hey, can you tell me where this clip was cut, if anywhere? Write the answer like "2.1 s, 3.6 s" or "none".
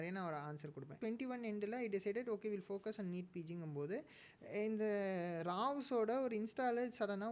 0.9 s

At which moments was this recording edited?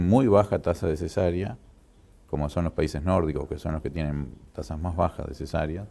none

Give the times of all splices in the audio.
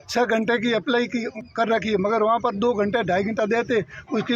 1.4 s

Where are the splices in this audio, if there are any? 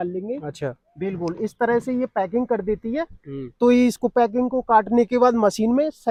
none

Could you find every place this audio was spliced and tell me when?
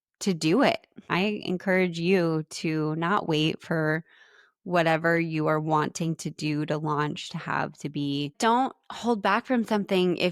1.1 s, 8.3 s

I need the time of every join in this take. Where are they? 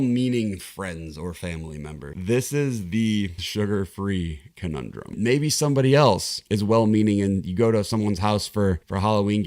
2.1 s, 5.2 s

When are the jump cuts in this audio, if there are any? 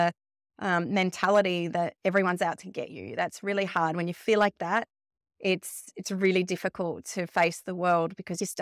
none

